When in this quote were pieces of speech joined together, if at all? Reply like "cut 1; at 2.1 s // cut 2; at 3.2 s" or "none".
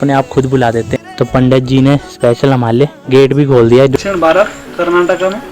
cut 1; at 0.9 s // cut 2; at 3.0 s // cut 3; at 3.9 s